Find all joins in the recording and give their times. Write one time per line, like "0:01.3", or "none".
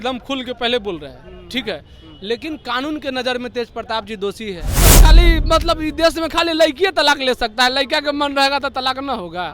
0:05.0